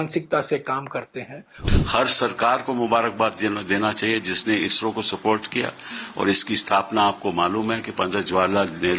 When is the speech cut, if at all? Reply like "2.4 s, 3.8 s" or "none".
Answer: 1.6 s